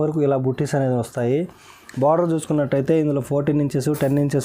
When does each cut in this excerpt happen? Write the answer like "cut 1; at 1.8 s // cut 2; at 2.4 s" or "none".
none